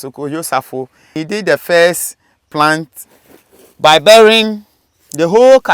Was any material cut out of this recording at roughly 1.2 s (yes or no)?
yes